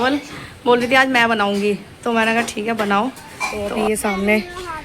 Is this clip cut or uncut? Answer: cut